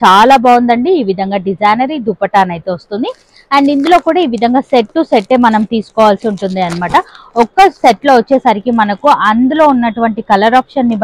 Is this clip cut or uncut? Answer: uncut